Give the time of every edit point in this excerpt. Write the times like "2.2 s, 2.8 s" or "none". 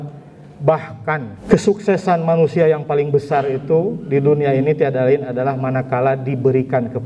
1.4 s

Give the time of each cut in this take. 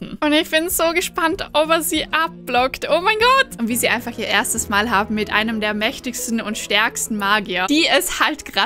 3.6 s, 7.7 s

